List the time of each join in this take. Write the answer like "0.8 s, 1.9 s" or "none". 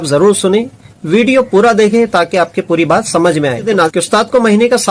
3.9 s